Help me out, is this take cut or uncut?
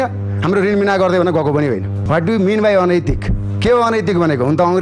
cut